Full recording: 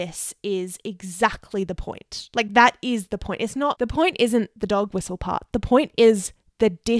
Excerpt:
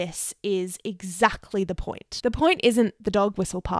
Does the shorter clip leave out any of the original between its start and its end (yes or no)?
yes